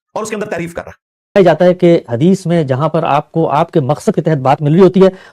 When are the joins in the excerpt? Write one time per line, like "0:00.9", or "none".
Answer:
0:01.4